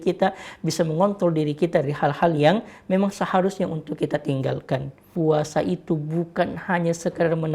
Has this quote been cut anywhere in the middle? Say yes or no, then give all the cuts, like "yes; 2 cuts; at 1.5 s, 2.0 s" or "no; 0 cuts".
yes; 1 cut; at 5.1 s